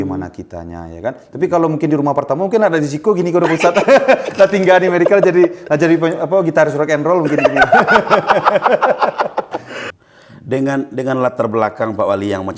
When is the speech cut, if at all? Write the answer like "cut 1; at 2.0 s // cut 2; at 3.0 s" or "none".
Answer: cut 1; at 9.8 s